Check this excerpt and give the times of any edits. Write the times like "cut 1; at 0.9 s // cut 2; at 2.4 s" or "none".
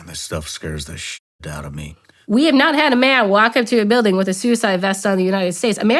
cut 1; at 2.2 s